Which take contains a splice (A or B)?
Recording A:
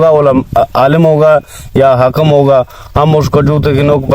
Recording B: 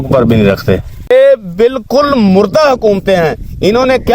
B